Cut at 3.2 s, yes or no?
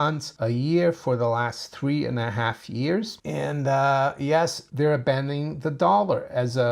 yes